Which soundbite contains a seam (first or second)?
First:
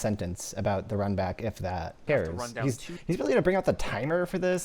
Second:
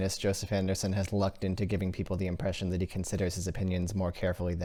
first